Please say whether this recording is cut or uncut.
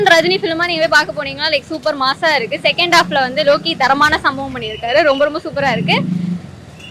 uncut